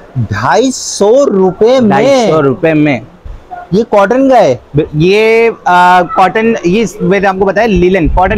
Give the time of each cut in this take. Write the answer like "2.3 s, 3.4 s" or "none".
none